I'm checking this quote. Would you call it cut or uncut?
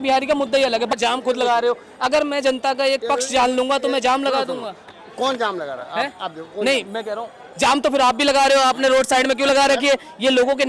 cut